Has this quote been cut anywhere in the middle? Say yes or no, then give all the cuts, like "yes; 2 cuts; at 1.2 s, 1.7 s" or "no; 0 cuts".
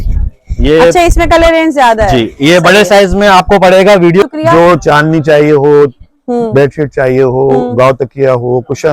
yes; 1 cut; at 4.2 s